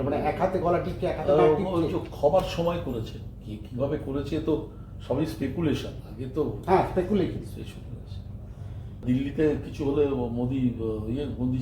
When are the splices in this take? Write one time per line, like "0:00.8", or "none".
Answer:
0:09.0